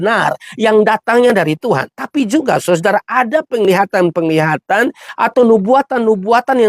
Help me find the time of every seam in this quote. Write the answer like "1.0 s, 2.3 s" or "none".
5.0 s